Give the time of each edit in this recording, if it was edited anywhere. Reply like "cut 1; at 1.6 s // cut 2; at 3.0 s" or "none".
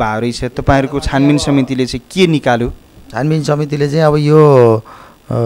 none

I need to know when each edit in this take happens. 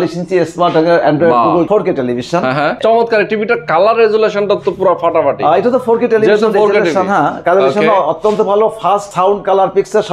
cut 1; at 2.8 s // cut 2; at 9.1 s

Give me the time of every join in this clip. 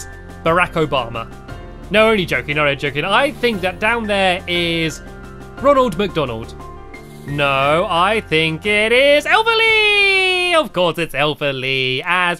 cut 1; at 9.8 s

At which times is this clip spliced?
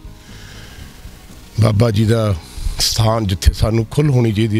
none

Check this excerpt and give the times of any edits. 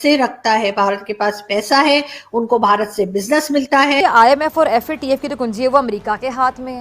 cut 1; at 4.0 s

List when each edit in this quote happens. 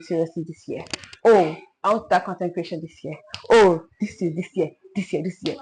none

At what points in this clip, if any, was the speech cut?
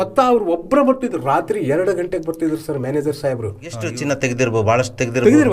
cut 1; at 3.9 s

